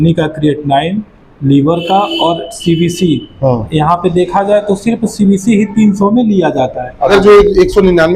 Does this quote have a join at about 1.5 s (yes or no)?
no